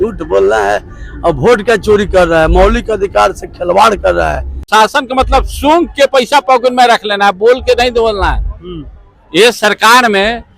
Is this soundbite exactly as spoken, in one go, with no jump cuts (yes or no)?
no